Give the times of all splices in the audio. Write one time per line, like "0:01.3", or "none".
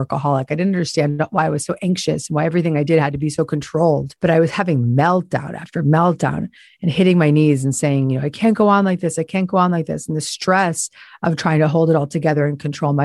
0:04.1